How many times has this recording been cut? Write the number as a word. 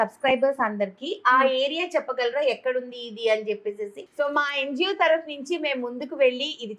one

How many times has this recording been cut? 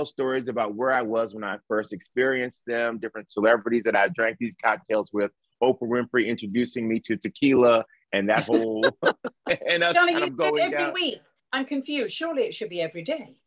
zero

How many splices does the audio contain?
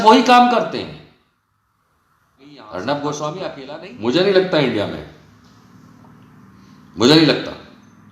one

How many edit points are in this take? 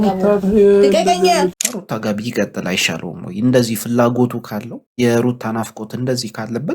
one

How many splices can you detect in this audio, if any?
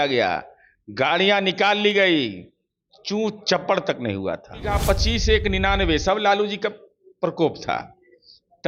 one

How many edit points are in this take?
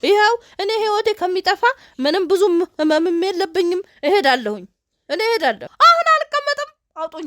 one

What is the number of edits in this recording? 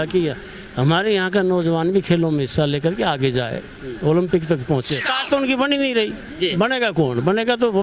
one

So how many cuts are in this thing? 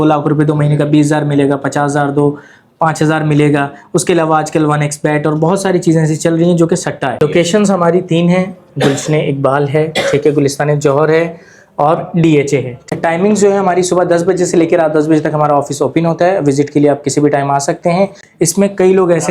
three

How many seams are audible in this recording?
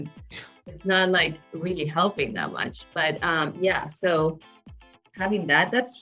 zero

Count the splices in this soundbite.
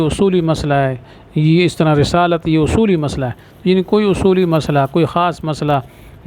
zero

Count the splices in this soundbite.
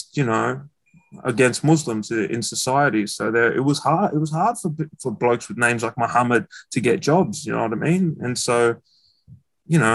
zero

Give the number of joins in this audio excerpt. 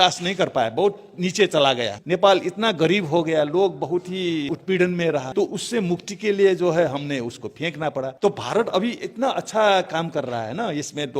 four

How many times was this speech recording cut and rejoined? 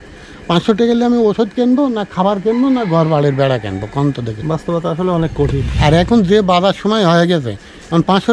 two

